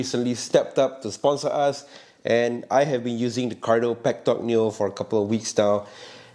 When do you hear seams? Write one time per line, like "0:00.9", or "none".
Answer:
none